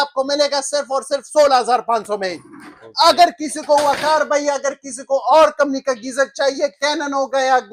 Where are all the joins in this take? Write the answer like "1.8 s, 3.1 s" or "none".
none